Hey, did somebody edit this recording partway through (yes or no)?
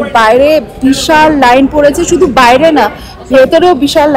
no